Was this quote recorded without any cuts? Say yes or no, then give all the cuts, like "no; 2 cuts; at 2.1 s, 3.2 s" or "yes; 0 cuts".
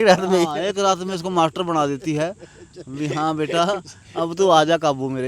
yes; 0 cuts